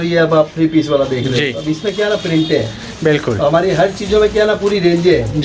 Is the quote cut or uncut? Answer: uncut